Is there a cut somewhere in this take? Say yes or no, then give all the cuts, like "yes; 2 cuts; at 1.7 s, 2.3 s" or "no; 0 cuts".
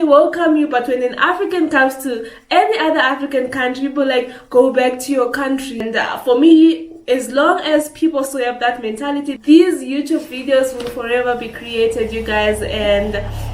yes; 2 cuts; at 5.8 s, 9.3 s